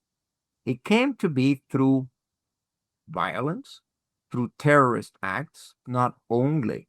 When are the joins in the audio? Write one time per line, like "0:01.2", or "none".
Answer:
0:05.8